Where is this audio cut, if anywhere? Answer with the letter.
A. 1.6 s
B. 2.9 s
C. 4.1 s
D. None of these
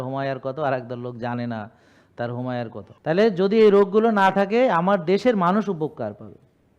B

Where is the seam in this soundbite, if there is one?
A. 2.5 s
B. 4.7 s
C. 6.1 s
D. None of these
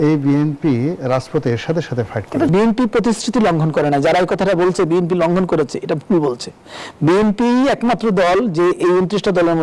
A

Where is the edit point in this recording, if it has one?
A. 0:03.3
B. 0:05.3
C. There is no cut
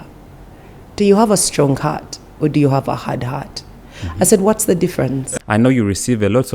B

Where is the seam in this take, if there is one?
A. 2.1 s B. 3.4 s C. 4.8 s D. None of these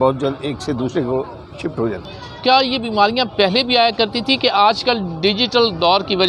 A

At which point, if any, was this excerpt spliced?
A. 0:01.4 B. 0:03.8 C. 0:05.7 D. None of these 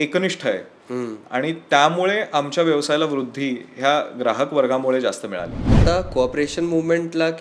C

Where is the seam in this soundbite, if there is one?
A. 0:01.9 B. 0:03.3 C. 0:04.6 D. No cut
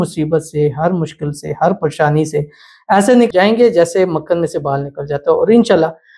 B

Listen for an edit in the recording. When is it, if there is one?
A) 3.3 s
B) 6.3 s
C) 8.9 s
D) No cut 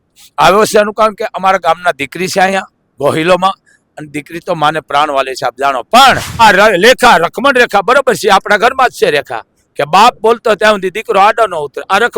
B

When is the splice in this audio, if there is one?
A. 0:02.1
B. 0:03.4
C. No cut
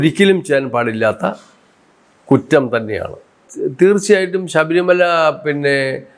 B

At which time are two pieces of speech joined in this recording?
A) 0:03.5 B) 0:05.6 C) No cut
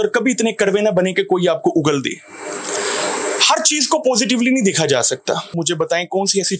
B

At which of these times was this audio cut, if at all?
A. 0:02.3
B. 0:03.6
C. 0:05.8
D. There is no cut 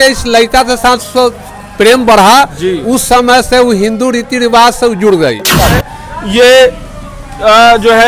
C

